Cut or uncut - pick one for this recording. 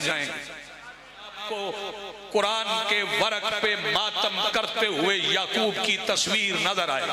cut